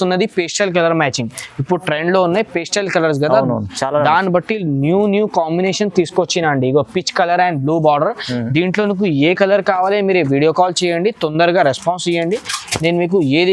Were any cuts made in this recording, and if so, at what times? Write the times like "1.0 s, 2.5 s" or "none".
none